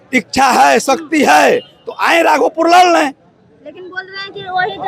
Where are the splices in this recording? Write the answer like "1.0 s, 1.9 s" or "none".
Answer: none